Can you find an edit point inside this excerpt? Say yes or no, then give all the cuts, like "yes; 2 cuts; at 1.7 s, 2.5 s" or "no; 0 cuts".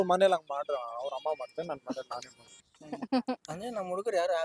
yes; 1 cut; at 2.6 s